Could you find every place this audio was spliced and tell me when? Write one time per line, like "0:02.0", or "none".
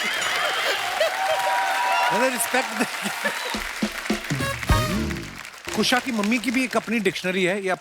0:05.7